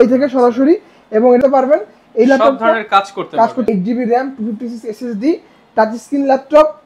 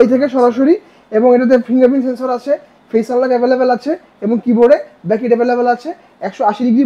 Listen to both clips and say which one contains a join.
first; 2 cuts; at 1.4 s, 3.7 s

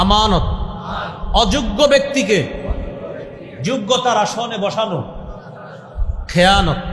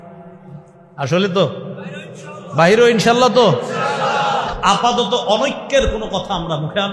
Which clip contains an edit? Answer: second; 1 cut; at 4.5 s

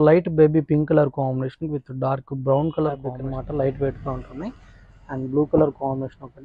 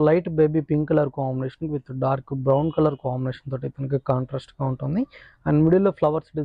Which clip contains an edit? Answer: first; 1 cut; at 3.2 s

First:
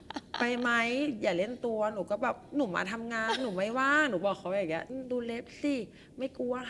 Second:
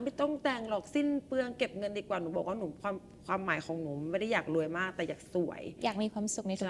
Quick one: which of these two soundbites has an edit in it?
first; 1 cut; at 4.9 s

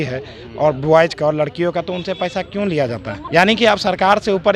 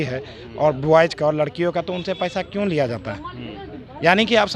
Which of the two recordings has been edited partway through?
first; 1 cut; at 3.1 s

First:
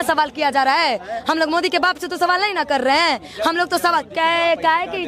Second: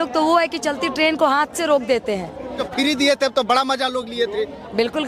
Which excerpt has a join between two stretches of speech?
second; 1 cut; at 2.6 s

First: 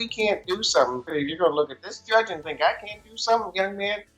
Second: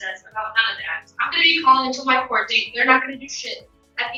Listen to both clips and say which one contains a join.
first; 1 cut; at 1.0 s

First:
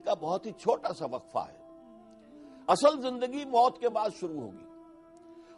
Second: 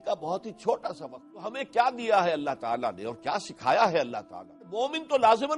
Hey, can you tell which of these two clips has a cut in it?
second; 2 cuts; at 1.6 s, 4.7 s

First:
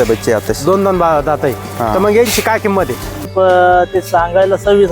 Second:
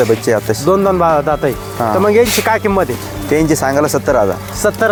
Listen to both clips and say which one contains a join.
first; 1 cut; at 3.3 s

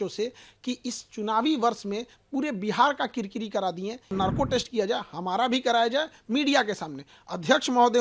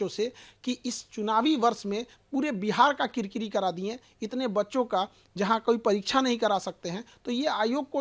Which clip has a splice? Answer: first; 1 cut; at 4.1 s

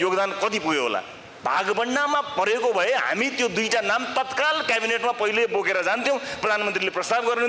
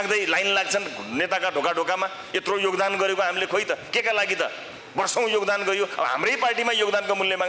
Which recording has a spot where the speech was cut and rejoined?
first; 1 cut; at 1.2 s

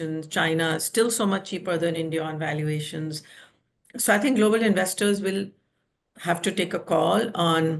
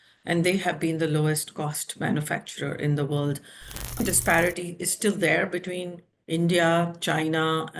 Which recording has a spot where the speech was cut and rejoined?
second; 1 cut; at 4.0 s

